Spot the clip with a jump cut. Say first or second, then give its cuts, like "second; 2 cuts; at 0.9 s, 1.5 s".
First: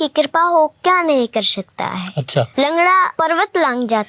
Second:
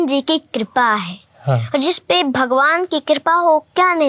first; 2 cuts; at 2.5 s, 3.1 s